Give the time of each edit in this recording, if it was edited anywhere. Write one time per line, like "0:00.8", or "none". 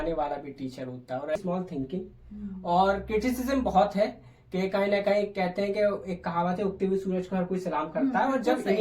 0:01.4